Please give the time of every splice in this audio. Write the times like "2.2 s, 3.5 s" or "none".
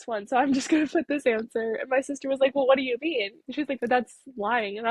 3.4 s